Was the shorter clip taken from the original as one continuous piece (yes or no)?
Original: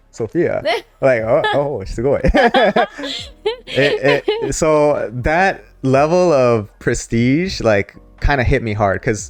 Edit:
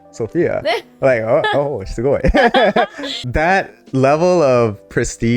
no